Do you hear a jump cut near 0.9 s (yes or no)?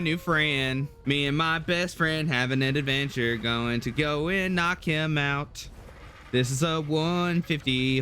yes